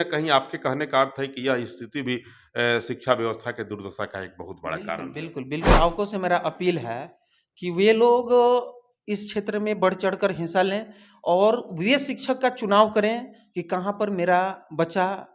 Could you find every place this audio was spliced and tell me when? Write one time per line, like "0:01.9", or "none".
0:05.7